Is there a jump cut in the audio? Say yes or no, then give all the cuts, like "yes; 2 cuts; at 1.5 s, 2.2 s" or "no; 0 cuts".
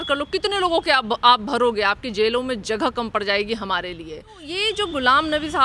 yes; 1 cut; at 4.5 s